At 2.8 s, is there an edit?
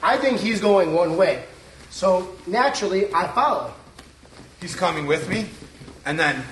no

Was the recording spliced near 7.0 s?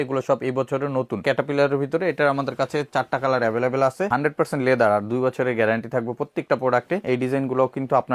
yes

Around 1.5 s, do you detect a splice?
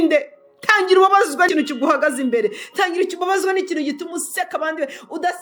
yes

